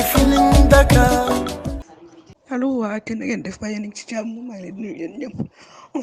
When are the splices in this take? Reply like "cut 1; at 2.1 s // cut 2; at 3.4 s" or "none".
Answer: cut 1; at 1.6 s